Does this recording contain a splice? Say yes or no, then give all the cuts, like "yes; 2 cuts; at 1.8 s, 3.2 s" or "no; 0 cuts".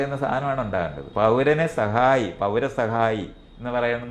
yes; 1 cut; at 1.0 s